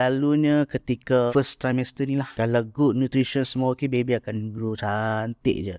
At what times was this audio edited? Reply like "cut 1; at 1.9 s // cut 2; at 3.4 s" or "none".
cut 1; at 1.3 s // cut 2; at 2.3 s